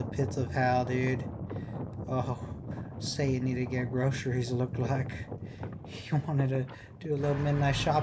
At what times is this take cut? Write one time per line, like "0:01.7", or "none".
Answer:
none